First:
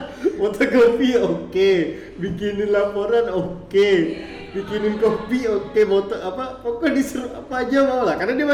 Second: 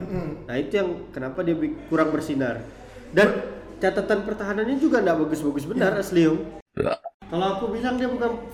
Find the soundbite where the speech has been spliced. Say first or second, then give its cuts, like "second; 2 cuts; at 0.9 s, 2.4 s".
second; 1 cut; at 6.6 s